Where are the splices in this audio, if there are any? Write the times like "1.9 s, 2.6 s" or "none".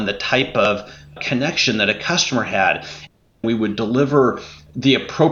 1.2 s, 3.4 s